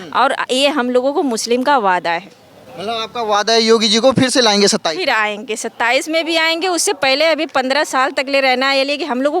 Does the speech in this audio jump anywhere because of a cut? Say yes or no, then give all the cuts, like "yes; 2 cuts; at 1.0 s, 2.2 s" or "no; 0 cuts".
no; 0 cuts